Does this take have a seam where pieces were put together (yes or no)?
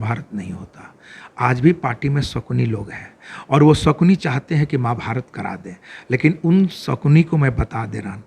no